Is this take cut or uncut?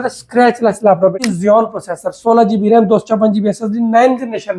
cut